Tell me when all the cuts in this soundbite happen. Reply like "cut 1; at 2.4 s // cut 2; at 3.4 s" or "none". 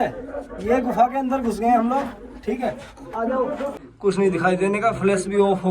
cut 1; at 3.8 s